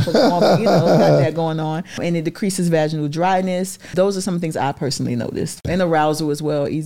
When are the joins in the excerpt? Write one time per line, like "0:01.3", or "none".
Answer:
0:02.0
0:03.9
0:05.6